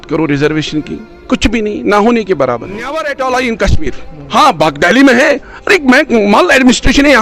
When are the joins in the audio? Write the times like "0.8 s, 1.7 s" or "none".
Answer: 2.9 s